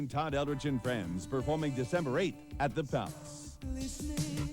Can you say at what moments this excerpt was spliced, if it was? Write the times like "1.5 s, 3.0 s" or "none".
3.5 s

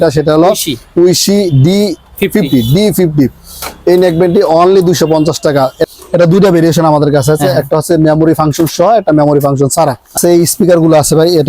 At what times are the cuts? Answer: 5.8 s, 10.2 s

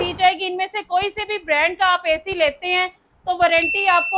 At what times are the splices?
none

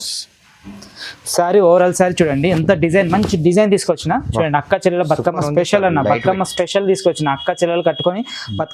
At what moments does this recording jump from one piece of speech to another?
none

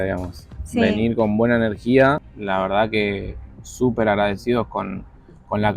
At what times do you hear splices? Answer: 2.3 s

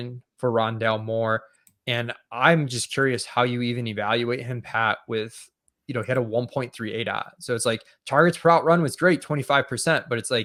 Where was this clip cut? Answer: none

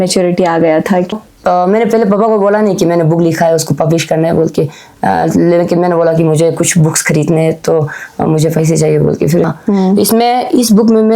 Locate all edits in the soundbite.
1.1 s, 9.5 s

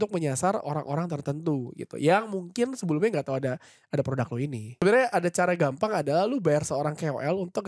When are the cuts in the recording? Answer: 4.7 s

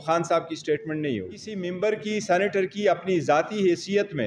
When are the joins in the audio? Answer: 1.5 s

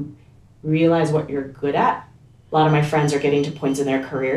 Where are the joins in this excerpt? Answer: 2.4 s

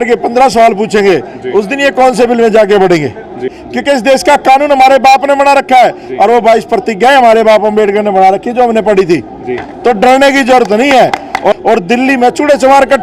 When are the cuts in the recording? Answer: 3.6 s, 11.5 s

